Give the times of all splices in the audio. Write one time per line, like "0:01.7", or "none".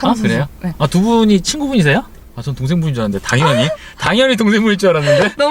0:02.2

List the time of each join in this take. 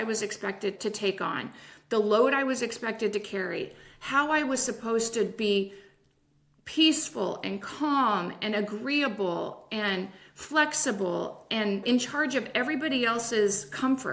0:00.8
0:11.8

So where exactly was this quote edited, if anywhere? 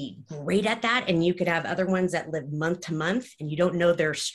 none

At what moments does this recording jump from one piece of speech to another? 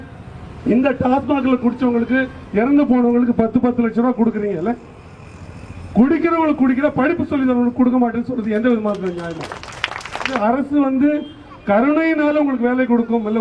0:10.3

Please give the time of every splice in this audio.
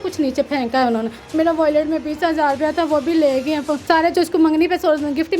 0:01.2
0:03.8

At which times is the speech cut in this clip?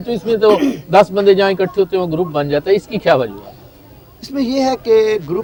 none

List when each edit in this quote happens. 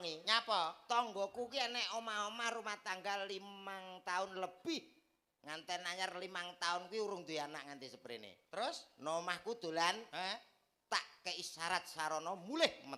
none

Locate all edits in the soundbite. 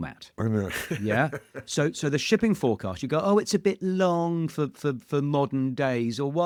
none

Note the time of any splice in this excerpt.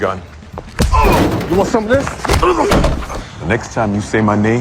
none

